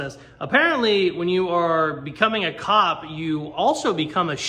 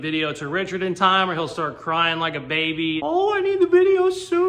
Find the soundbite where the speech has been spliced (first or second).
second